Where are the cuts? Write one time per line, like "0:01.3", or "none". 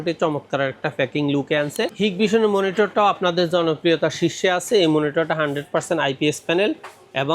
0:01.9

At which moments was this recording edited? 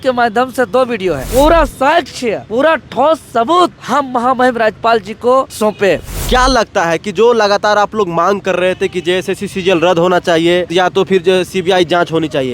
0:01.3
0:02.4
0:03.8
0:05.9
0:10.7

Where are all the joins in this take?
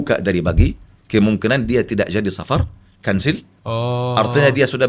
none

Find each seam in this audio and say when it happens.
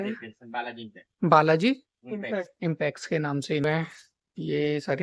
0:03.6

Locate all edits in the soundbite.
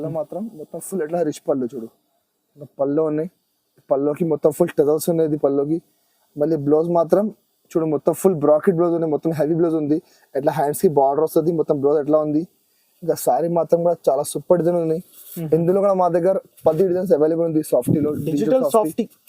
none

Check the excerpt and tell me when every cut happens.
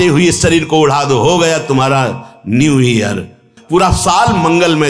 0:03.5

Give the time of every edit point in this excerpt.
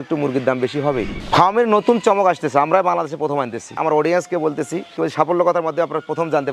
0:01.1
0:03.7

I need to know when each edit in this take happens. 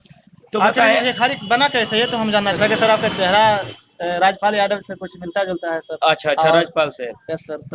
0:02.5

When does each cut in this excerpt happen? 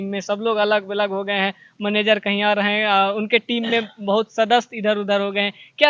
none

